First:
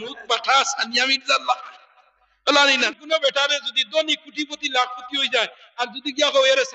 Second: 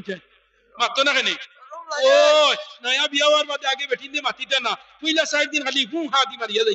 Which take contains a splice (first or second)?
first